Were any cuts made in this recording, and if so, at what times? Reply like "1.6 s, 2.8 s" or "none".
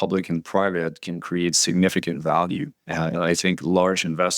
2.8 s

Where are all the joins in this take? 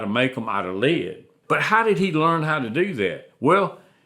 1.3 s

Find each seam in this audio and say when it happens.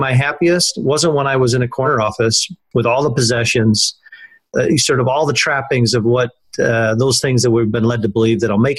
2.1 s, 4.5 s

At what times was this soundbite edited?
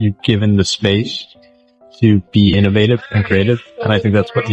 none

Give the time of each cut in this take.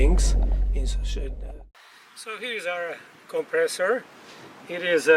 1.5 s

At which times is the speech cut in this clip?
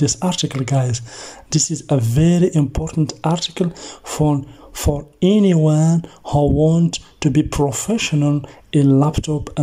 none

